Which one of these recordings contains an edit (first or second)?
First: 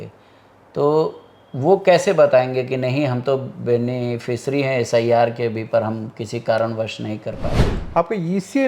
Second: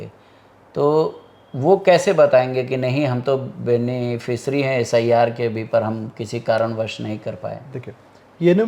first